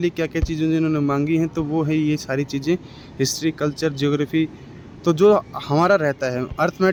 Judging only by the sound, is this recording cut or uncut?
uncut